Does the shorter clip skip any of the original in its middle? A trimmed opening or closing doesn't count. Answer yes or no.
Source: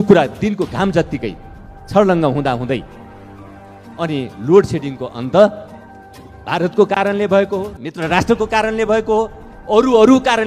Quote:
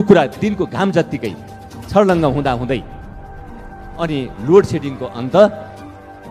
no